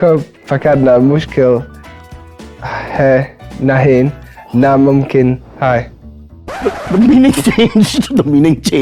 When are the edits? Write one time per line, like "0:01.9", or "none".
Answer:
none